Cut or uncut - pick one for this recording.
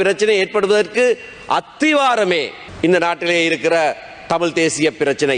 cut